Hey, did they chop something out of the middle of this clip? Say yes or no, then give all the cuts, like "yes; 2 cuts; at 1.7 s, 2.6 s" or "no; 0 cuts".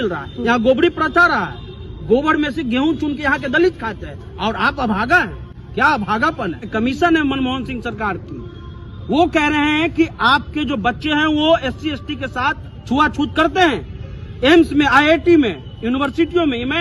yes; 1 cut; at 6.7 s